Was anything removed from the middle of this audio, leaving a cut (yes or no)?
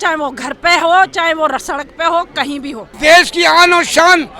yes